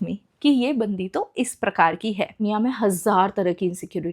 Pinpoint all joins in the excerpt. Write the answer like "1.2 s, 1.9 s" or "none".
2.4 s